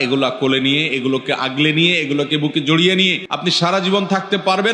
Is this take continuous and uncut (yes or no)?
no